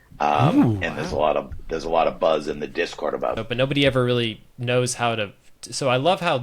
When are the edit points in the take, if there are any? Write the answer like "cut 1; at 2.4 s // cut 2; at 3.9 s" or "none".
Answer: cut 1; at 3.4 s